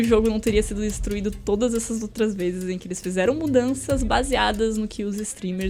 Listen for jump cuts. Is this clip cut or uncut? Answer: uncut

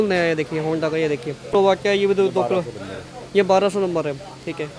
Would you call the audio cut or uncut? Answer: cut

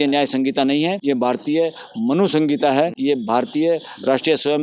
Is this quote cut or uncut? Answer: cut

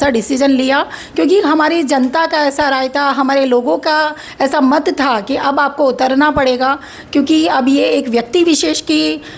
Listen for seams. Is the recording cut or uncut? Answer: uncut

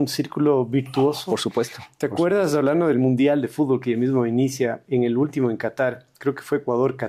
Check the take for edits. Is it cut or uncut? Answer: uncut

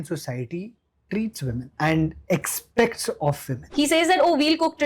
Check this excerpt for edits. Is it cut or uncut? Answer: cut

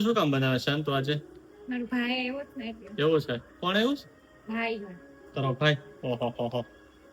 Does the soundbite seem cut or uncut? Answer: uncut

